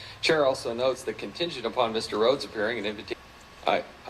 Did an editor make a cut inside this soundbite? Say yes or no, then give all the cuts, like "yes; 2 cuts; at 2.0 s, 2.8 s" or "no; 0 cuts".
no; 0 cuts